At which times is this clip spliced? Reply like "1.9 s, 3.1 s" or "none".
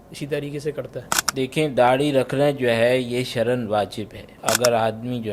1.2 s, 4.3 s